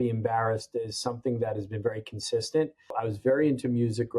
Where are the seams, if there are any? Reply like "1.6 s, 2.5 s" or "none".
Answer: 2.9 s